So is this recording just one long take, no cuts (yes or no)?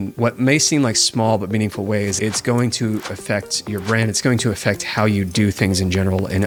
yes